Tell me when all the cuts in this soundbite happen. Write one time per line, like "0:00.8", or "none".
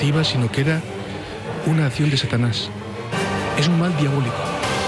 0:03.0